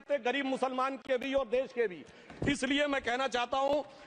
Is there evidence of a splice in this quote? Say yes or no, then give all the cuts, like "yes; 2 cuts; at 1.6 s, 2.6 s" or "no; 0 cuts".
no; 0 cuts